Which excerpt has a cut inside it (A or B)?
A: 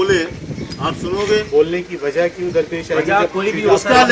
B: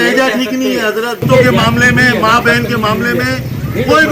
B